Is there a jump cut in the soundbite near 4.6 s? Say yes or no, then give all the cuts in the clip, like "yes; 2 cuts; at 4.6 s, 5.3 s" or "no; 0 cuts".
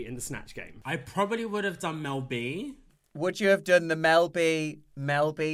no; 2 cuts; at 0.9 s, 3.0 s